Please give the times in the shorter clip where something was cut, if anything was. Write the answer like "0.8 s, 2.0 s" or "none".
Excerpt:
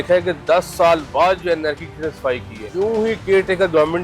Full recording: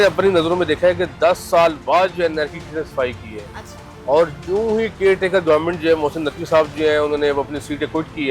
2.6 s